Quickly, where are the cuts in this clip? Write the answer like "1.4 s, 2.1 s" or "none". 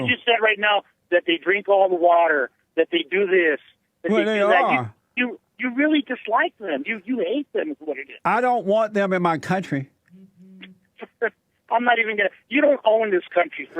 none